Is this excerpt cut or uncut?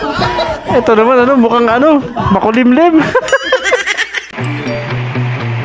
cut